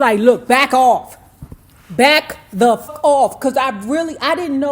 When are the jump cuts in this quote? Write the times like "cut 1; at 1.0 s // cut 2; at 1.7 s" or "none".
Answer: cut 1; at 2.9 s